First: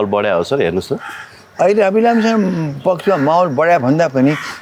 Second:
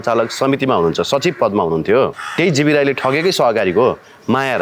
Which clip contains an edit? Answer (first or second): second